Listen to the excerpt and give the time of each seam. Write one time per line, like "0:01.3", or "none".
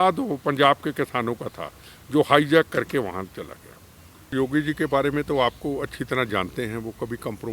0:04.3